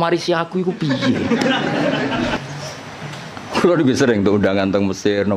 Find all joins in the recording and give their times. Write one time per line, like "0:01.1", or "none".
0:02.4